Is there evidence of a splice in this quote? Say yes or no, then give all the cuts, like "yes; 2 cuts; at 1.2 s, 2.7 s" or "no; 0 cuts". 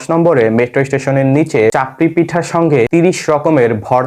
yes; 2 cuts; at 1.7 s, 2.9 s